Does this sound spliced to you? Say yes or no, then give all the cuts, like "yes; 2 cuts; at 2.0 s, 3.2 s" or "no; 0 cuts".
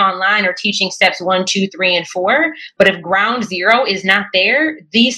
no; 0 cuts